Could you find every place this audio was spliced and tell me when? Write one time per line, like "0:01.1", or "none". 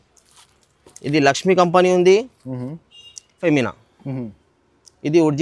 0:03.4